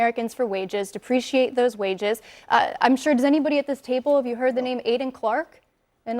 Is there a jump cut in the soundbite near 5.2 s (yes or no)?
no